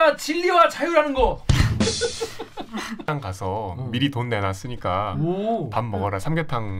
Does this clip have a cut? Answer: yes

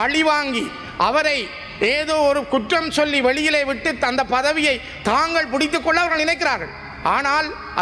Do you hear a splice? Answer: no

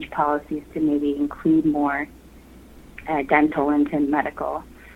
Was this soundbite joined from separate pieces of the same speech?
no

